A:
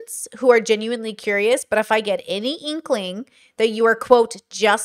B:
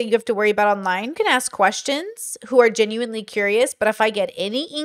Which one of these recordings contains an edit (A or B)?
B